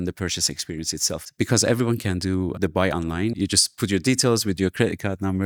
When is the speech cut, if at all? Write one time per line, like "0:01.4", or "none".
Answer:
none